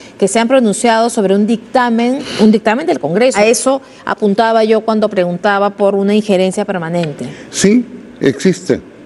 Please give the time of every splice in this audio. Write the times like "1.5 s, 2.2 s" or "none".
2.3 s, 3.3 s